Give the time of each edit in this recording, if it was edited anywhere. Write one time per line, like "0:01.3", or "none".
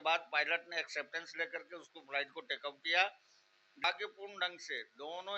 0:03.8

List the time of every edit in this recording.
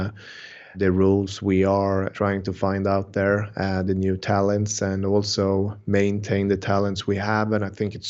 0:00.8
0:02.1

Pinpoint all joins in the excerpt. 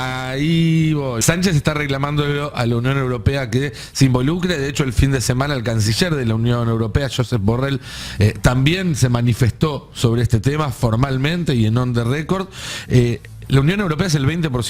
0:01.2

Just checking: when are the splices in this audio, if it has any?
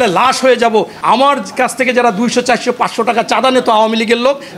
0:00.9

